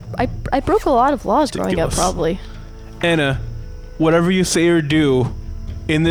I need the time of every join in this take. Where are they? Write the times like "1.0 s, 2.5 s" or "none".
none

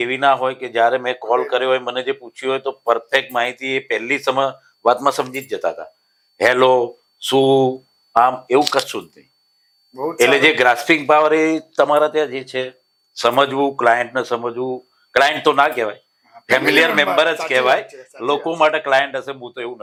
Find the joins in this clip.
none

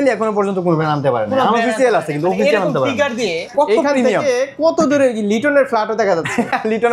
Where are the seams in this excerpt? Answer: 3.5 s

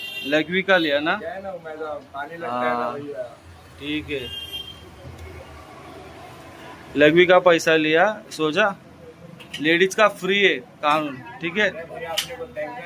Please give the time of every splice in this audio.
none

